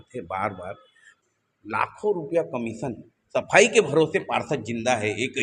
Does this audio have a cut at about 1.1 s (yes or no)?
yes